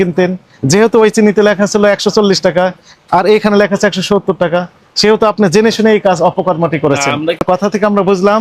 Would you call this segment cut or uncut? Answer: cut